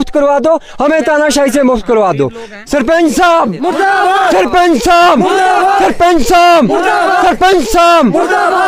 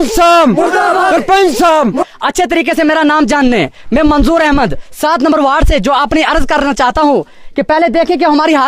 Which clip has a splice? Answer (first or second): second